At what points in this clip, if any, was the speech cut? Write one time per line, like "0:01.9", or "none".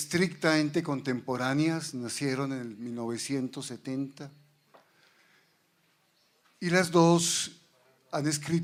none